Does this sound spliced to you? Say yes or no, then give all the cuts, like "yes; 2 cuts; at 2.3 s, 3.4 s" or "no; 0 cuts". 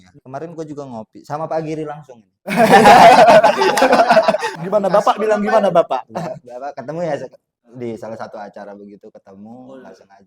no; 0 cuts